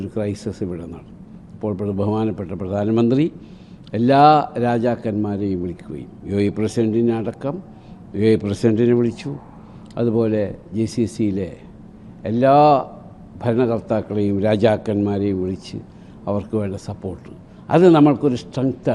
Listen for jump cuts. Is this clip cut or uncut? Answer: uncut